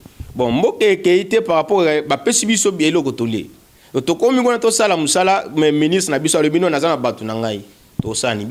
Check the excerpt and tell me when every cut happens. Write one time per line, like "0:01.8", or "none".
none